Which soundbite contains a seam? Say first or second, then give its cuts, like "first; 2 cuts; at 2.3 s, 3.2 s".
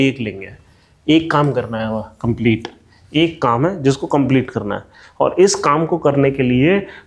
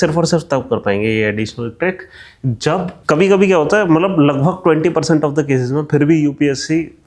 second; 1 cut; at 3.0 s